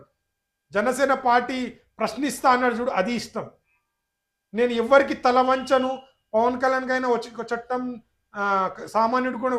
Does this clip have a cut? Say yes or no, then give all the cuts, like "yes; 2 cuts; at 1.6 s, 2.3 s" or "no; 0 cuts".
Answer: no; 0 cuts